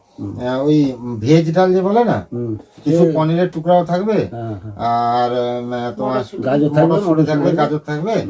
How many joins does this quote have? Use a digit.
0